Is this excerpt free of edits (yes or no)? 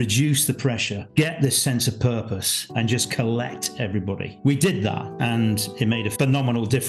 no